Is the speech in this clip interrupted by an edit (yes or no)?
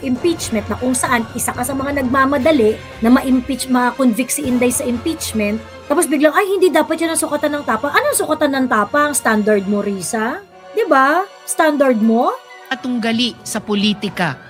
no